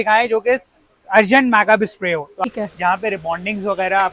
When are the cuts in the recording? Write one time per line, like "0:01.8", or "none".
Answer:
0:02.5